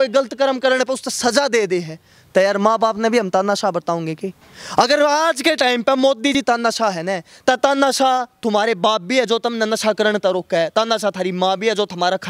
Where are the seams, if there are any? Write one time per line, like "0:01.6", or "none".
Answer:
none